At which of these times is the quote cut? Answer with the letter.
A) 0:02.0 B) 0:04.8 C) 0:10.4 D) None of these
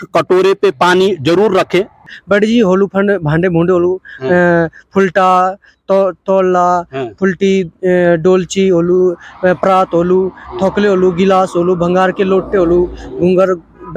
A